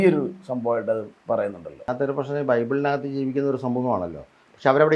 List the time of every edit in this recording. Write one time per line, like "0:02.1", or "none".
0:01.9